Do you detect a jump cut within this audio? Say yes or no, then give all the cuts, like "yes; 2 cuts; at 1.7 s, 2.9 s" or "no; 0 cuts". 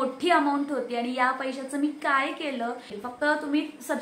yes; 1 cut; at 3.0 s